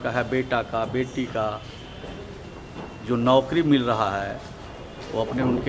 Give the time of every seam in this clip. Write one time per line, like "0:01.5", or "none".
none